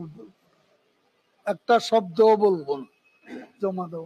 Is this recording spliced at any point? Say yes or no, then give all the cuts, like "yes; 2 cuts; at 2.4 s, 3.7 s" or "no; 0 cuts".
no; 0 cuts